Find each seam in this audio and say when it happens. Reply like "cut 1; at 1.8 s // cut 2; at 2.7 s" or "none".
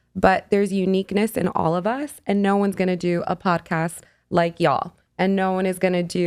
none